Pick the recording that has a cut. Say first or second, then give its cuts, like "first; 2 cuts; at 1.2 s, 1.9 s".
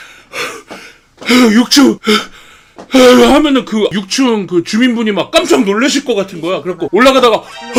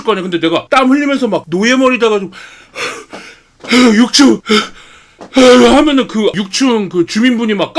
second; 1 cut; at 1.4 s